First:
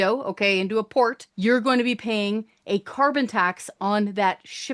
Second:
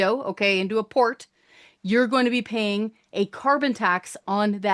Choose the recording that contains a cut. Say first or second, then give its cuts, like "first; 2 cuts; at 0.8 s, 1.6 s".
first; 1 cut; at 1.2 s